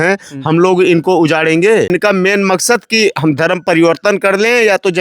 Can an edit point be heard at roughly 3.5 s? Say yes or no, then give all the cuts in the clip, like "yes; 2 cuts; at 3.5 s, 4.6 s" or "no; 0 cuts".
no; 1 cut; at 1.9 s